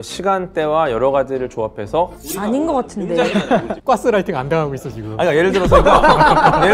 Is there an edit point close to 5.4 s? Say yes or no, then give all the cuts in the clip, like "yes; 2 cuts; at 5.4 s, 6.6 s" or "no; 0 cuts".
no; 2 cuts; at 2.2 s, 3.7 s